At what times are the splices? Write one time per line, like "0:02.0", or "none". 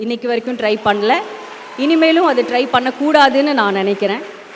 none